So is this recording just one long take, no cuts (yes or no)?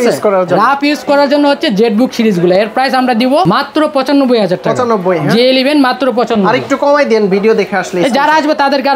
yes